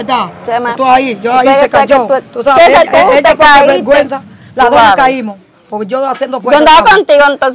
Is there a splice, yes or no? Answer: no